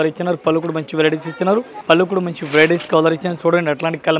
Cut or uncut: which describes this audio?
cut